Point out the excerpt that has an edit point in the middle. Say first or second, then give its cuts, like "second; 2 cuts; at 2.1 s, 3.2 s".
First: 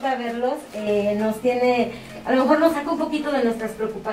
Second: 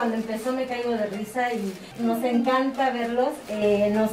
second; 1 cut; at 1.8 s